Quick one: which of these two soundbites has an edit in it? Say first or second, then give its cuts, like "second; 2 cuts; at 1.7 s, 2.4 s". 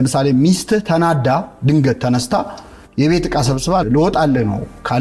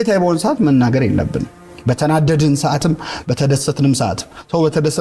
first; 1 cut; at 3.8 s